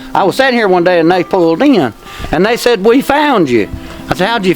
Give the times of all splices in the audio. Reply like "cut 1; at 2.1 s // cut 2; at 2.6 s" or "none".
none